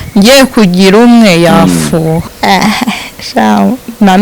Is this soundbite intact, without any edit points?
no; 1 cut; at 2.3 s

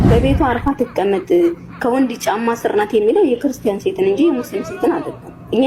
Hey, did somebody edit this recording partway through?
no; 0 cuts

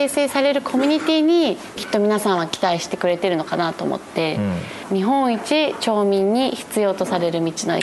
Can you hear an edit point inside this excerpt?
yes; 1 cut; at 4.8 s

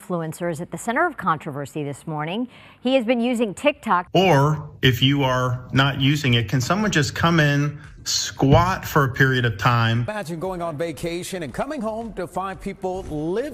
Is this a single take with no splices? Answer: yes; 0 cuts

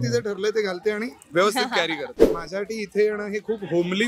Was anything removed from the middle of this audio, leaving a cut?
yes; 1 cut; at 2.3 s

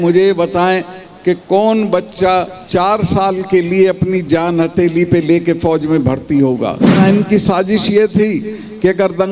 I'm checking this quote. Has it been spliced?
yes; 2 cuts; at 2.6 s, 6.9 s

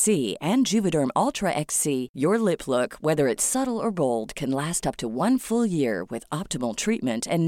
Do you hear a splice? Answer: no; 0 cuts

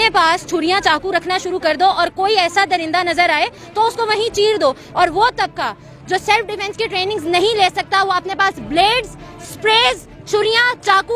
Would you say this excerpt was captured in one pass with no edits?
no; 1 cut; at 4.8 s

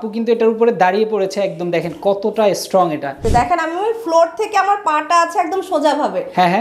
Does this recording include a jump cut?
yes; 1 cut; at 3.1 s

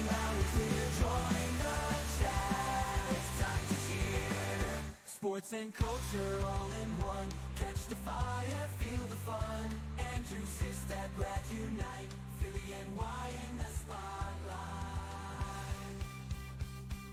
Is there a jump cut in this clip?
no; 0 cuts

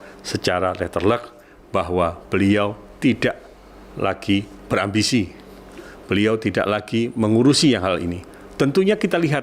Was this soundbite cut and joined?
yes; 1 cut; at 4.6 s

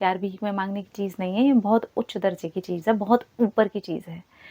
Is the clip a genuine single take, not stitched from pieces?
yes; 0 cuts

